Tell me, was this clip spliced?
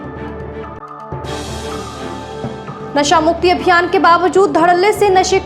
yes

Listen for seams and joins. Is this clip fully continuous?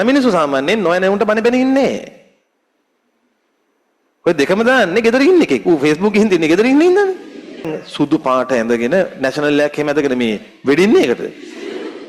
no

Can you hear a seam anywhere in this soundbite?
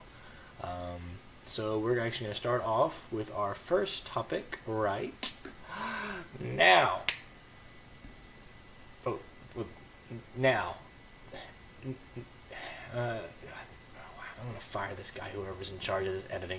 yes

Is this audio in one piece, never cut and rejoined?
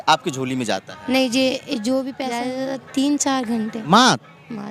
no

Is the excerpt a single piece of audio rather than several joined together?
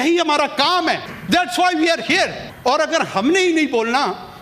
no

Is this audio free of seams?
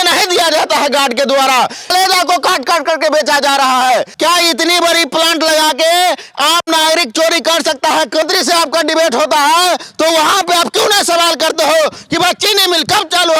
no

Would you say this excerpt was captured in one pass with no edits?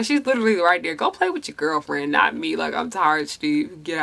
yes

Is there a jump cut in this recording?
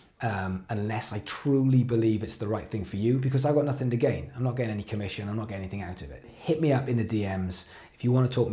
yes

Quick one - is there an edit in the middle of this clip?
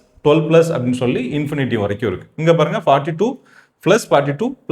no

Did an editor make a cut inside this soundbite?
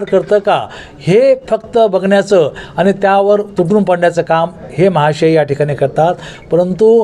no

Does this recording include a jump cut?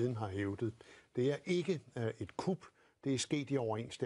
no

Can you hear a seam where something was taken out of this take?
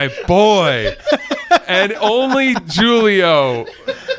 no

